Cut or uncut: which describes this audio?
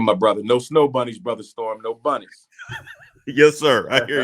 uncut